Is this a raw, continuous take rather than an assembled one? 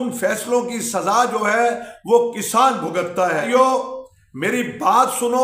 no; 1 cut; at 3.4 s

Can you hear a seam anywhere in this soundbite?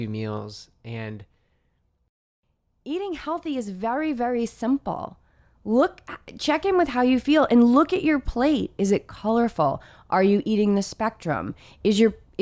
yes; 1 cut; at 2.1 s

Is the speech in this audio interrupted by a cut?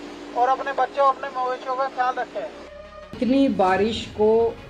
yes; 1 cut; at 3.2 s

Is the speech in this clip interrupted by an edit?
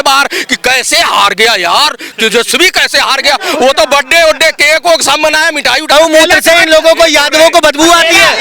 yes; 1 cut; at 5.8 s

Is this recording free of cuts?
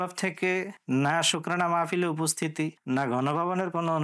yes; 0 cuts

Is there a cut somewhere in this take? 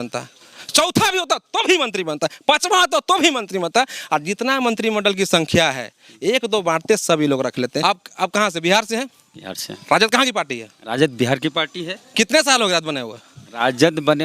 yes; 1 cut; at 7.8 s

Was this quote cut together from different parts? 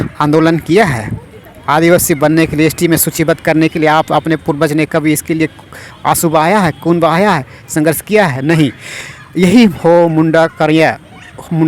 no; 0 cuts

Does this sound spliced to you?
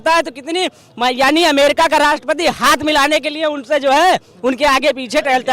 no; 0 cuts

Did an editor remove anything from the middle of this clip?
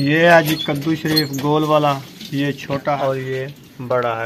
yes; 1 cut; at 2.9 s

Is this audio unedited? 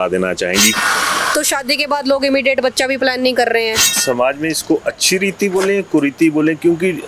no; 2 cuts; at 0.7 s, 3.9 s

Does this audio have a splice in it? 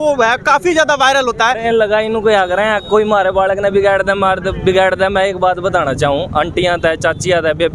yes; 1 cut; at 1.6 s

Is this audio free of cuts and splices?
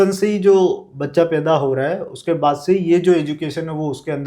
yes; 0 cuts

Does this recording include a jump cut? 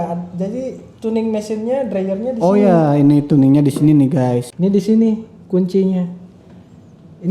yes; 1 cut; at 4.5 s

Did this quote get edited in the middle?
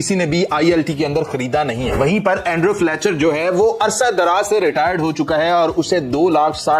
no; 0 cuts

